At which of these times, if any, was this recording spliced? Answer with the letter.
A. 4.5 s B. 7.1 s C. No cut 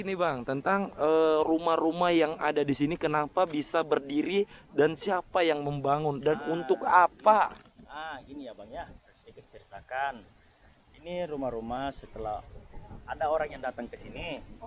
C